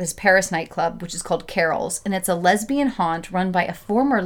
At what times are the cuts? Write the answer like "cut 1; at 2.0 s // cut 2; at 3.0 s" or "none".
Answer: none

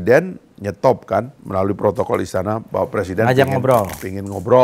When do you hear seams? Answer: cut 1; at 1.4 s

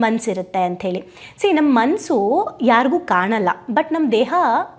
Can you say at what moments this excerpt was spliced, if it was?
none

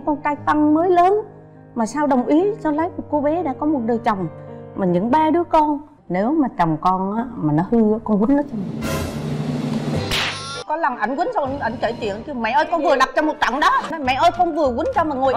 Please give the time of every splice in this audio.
cut 1; at 6.0 s // cut 2; at 10.6 s // cut 3; at 13.9 s

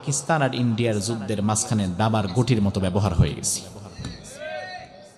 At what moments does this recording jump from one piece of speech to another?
none

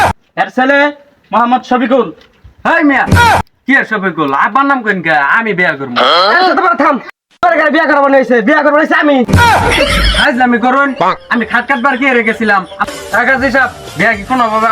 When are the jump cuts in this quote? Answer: cut 1; at 12.7 s

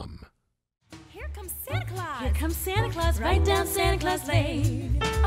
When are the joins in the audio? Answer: cut 1; at 1.1 s

